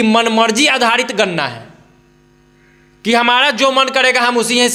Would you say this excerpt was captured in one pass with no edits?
yes; 0 cuts

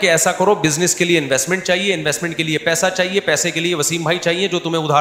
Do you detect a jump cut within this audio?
no; 0 cuts

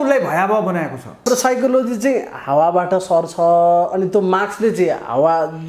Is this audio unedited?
no; 1 cut; at 1.2 s

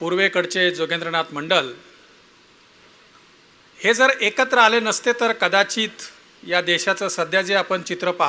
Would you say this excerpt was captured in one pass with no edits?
yes; 0 cuts

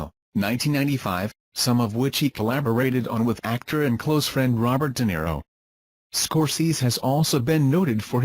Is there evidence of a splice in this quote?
yes; 1 cut; at 4.8 s

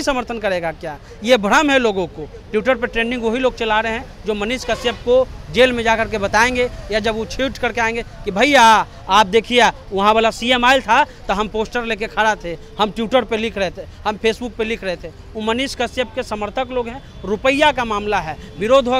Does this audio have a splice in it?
no; 0 cuts

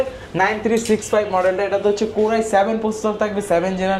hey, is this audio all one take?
yes; 0 cuts

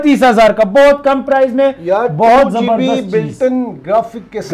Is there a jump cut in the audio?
no; 0 cuts

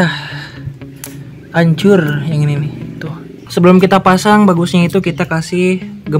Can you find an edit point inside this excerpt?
yes; 1 cut; at 3.4 s

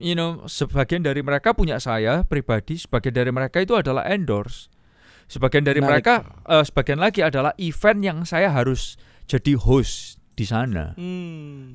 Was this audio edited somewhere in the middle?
no; 0 cuts

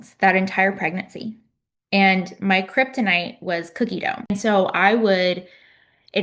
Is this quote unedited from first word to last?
no; 1 cut; at 4.3 s

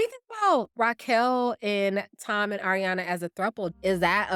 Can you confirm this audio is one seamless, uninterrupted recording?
yes; 0 cuts

